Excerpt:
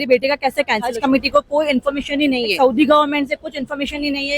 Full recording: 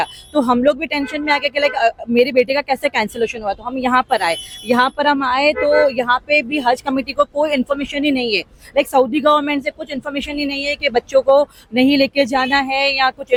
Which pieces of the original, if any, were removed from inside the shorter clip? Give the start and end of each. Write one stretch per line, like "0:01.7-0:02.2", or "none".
0:03.2-0:06.8
0:08.4-0:08.9